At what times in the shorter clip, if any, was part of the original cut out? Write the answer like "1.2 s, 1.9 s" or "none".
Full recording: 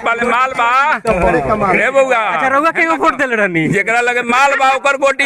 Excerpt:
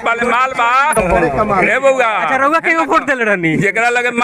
0.9 s